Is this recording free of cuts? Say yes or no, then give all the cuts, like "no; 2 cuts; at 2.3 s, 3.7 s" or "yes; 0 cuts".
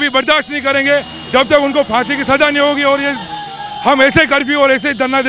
yes; 0 cuts